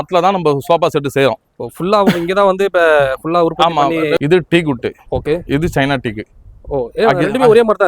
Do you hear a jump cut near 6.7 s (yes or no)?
no